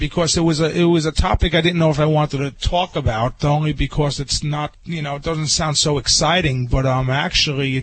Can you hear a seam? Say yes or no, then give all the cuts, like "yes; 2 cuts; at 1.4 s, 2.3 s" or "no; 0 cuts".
yes; 1 cut; at 4.8 s